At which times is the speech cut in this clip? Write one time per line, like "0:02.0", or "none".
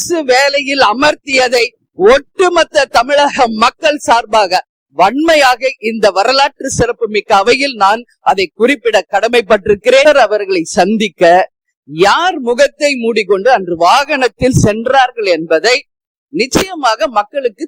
0:10.0